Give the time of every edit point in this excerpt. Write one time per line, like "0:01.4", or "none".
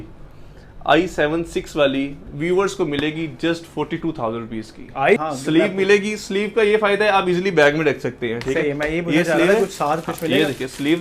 0:05.2